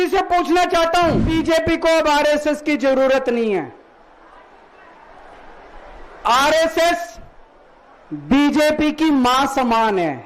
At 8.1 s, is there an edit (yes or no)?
no